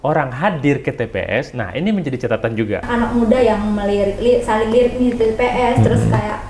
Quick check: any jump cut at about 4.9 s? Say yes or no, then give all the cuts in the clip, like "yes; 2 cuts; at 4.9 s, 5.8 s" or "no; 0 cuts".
no; 1 cut; at 2.9 s